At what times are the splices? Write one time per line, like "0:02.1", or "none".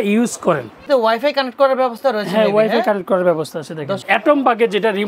0:00.8
0:04.0